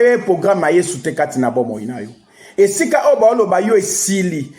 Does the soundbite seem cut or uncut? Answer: uncut